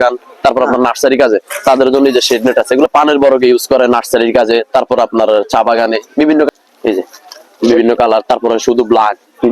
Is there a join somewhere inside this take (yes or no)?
yes